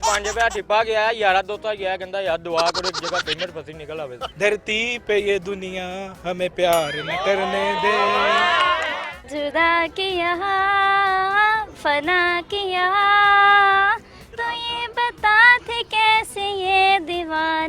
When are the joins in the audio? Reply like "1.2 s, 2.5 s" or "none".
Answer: 4.2 s, 9.0 s